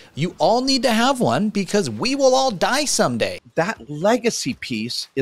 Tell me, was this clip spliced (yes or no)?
yes